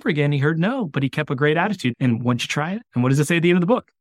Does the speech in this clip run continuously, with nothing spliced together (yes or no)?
no